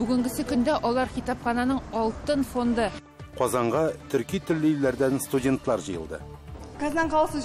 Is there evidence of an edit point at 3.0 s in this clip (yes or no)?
yes